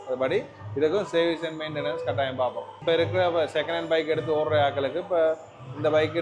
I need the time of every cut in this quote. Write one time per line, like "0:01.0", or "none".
0:02.8